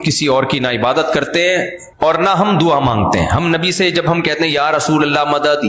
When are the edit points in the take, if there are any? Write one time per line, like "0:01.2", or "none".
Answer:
0:01.8

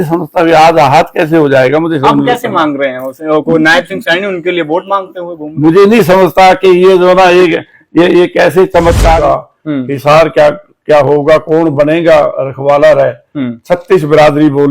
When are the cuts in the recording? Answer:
0:09.2

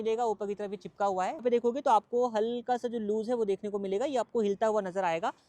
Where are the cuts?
0:01.4

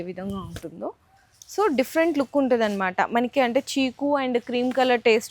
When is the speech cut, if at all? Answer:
none

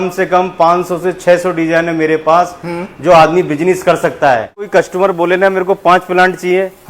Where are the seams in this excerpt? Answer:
0:04.7

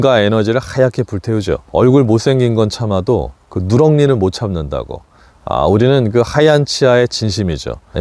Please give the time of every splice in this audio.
0:01.6

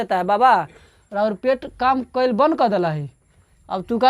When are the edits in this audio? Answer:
none

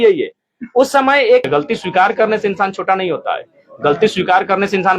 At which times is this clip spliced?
0:01.4

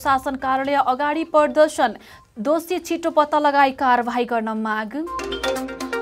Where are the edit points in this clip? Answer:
0:05.1

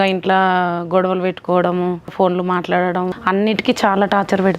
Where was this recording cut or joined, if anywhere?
0:02.1
0:03.2

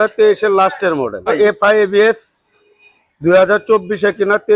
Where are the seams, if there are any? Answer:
0:01.3

